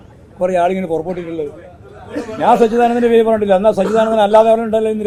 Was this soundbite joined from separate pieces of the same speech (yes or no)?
no